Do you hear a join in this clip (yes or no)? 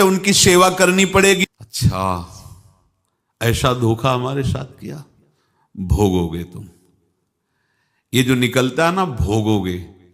yes